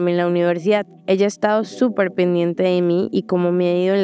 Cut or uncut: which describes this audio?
cut